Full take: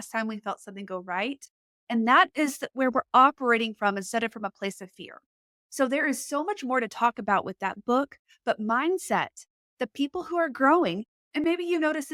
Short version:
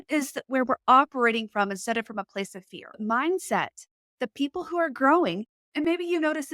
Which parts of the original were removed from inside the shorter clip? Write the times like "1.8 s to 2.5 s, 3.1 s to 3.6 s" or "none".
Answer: 5.3 s to 8.6 s